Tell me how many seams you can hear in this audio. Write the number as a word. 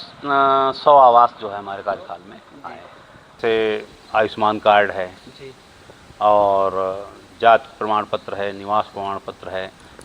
one